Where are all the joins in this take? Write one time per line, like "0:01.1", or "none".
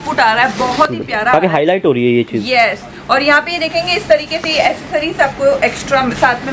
none

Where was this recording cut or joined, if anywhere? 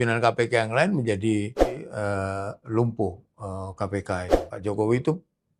0:01.9
0:04.4

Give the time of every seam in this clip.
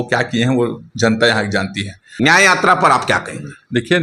0:02.1

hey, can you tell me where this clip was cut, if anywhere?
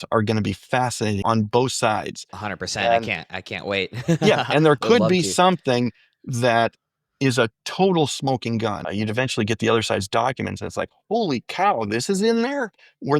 0:01.2
0:08.8

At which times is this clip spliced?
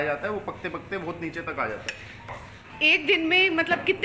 0:02.7

